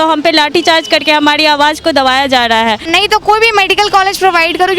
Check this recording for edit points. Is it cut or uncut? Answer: cut